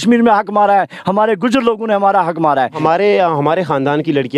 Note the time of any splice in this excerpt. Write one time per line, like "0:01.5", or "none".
0:02.8